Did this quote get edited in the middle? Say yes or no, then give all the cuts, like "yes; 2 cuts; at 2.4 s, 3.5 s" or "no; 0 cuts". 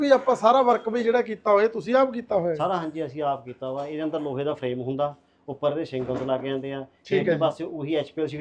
no; 0 cuts